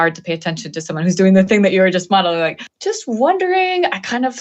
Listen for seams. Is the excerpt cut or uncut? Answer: cut